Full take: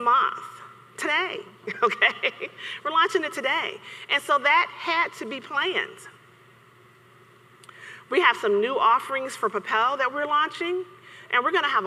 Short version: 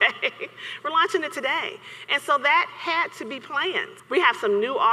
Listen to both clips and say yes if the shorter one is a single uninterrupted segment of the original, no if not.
no